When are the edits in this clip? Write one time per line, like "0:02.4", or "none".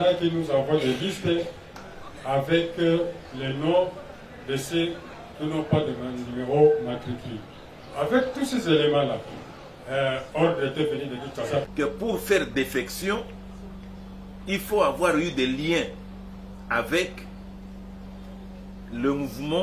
0:11.6